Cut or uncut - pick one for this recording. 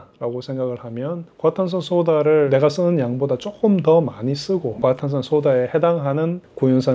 uncut